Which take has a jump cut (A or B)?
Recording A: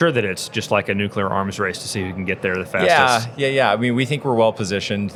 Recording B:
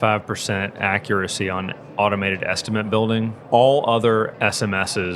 B